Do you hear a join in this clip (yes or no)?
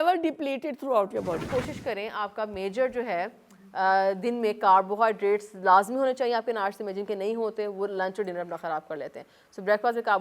yes